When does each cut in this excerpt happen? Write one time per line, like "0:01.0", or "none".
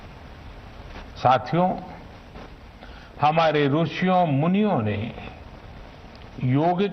0:00.9